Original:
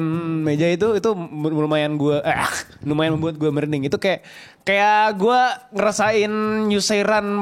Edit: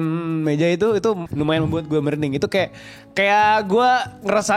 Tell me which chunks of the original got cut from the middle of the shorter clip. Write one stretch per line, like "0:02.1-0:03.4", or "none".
0:01.3-0:02.8

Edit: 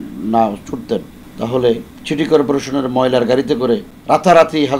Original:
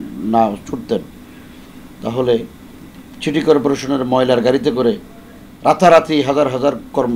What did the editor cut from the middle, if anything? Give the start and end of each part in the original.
0:01.2-0:01.8
0:02.6-0:03.1
0:05.1-0:05.5

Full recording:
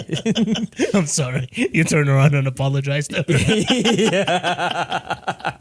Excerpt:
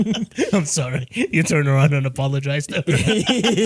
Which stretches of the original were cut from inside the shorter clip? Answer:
none

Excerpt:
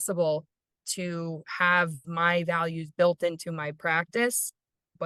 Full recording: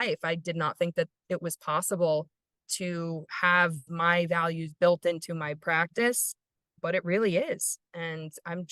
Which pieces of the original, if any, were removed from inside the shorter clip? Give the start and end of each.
none

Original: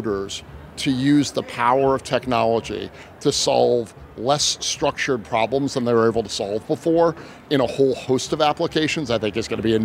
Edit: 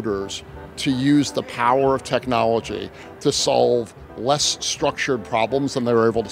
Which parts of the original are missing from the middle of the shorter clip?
none

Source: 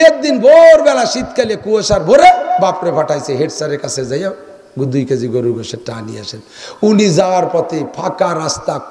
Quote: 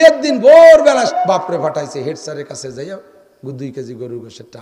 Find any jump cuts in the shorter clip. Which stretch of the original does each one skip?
0:01.1-0:02.4

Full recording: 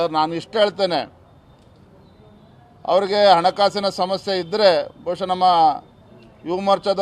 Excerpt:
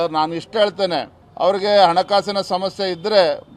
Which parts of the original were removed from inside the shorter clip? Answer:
0:01.2-0:02.7

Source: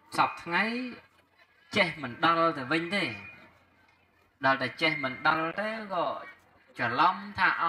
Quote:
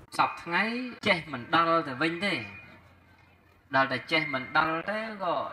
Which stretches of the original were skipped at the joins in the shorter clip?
0:00.9-0:01.6

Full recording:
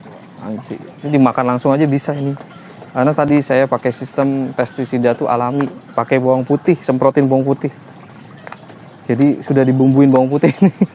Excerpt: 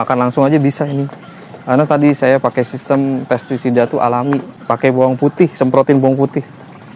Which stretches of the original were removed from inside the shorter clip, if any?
none

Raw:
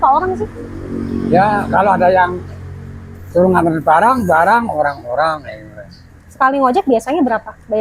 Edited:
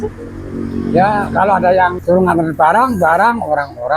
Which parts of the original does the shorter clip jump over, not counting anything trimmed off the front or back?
0:02.4-0:03.3

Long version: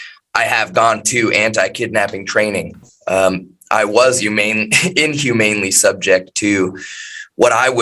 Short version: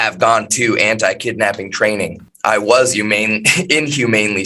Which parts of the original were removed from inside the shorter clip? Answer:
0:02.8-0:03.5

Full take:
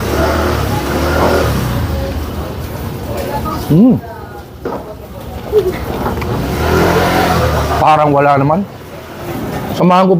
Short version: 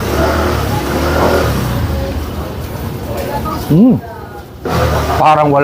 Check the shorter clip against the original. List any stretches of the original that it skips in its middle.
0:04.7-0:07.3

